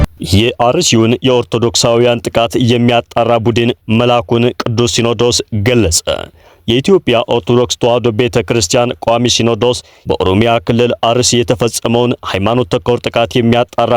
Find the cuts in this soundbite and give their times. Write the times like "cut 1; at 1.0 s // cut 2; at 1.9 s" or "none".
none